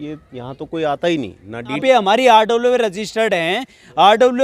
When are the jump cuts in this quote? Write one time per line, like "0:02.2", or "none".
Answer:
0:01.8